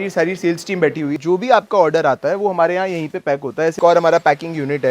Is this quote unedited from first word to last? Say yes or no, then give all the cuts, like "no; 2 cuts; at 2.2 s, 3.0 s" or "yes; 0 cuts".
no; 2 cuts; at 1.2 s, 3.8 s